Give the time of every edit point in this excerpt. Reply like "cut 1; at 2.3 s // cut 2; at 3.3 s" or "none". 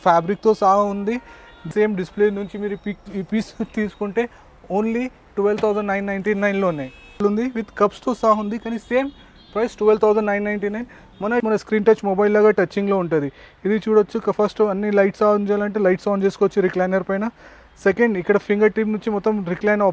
cut 1; at 1.7 s // cut 2; at 7.2 s // cut 3; at 11.4 s